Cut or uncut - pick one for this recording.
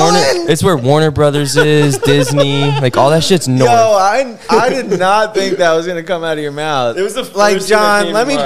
uncut